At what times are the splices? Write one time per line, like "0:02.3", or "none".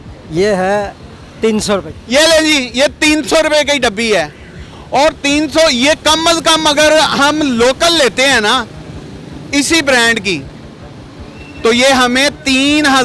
none